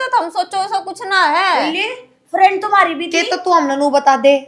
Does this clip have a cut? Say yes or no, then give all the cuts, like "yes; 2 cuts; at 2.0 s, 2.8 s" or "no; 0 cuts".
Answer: no; 0 cuts